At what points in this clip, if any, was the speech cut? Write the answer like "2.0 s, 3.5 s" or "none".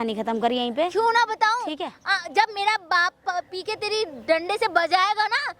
none